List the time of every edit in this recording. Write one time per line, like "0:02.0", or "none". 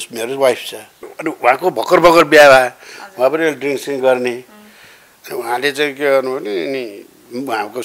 0:01.1